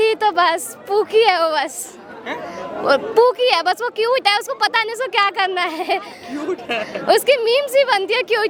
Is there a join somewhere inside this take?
no; 0 cuts

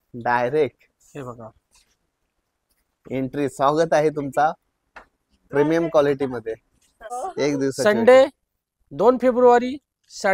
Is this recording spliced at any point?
yes; 1 cut; at 7.2 s

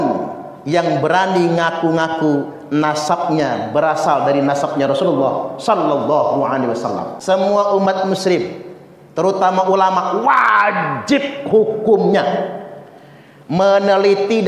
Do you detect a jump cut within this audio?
yes; 1 cut; at 7.1 s

